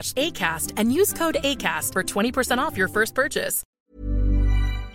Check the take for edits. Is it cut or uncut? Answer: cut